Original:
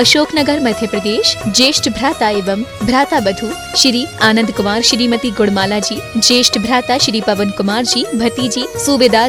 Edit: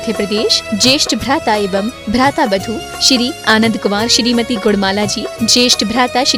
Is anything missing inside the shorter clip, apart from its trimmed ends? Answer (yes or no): no